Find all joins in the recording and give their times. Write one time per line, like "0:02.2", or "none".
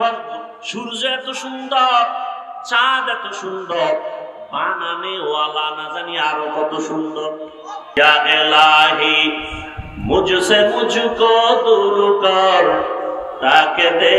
0:07.9